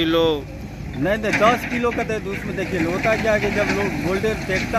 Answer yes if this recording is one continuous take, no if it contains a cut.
yes